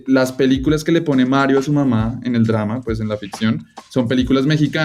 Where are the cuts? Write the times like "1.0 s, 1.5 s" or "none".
none